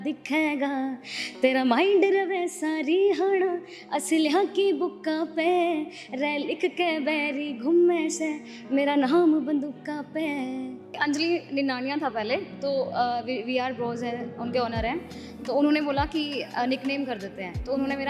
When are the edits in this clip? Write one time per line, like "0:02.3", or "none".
0:11.0